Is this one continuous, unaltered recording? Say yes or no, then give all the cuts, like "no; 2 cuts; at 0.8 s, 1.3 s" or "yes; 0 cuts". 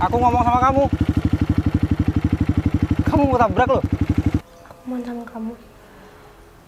no; 1 cut; at 4.4 s